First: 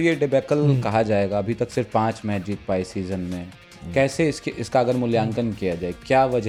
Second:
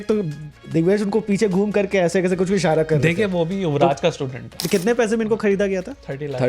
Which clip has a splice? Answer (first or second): second